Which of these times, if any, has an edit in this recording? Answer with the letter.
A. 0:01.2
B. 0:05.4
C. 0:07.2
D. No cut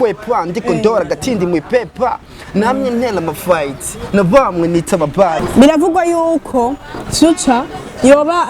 B